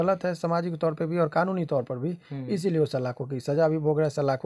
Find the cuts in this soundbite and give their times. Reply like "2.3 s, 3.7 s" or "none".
none